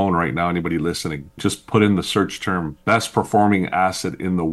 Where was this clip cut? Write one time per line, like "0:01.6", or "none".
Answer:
0:01.4
0:02.7